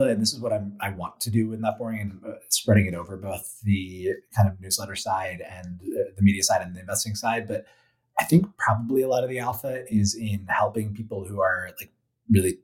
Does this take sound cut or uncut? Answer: uncut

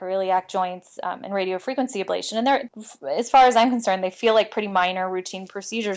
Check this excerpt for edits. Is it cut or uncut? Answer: cut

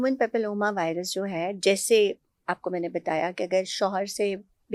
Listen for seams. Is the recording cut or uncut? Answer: uncut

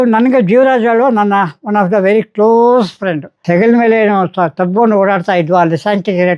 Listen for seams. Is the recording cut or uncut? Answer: cut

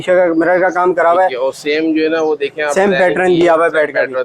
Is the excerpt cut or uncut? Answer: uncut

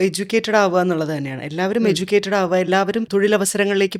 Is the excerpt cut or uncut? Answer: cut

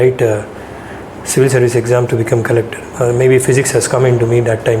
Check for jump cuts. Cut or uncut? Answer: cut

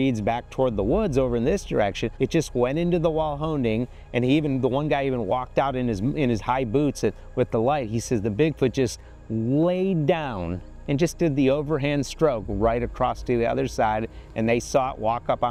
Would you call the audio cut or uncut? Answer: uncut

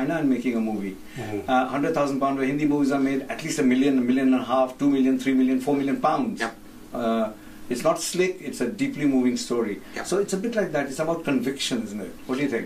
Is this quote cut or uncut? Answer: uncut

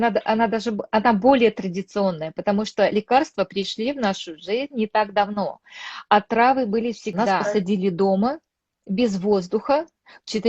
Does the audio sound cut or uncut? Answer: cut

